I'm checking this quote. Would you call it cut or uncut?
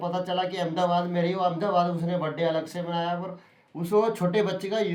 uncut